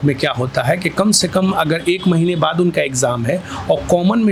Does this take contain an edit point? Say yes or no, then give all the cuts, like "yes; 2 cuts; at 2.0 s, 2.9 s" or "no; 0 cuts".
no; 0 cuts